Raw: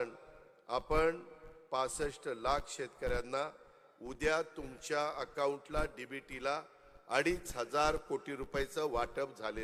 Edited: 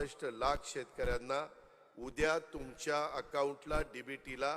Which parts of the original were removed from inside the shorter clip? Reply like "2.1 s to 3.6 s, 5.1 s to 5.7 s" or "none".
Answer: none